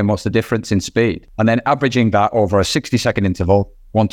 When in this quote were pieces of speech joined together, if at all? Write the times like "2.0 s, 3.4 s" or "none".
1.3 s